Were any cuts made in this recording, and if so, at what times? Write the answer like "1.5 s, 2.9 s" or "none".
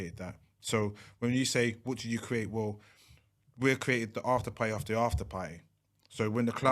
none